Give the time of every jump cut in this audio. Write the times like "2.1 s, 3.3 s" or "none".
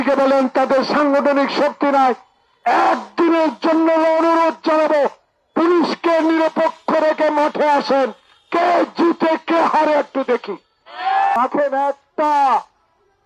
11.3 s